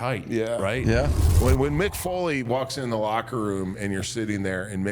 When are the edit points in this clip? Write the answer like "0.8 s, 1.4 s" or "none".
1.4 s